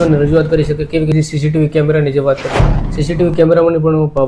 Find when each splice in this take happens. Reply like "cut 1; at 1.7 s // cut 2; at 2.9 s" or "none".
cut 1; at 1.1 s